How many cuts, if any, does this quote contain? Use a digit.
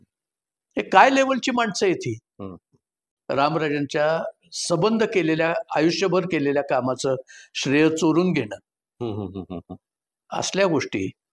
1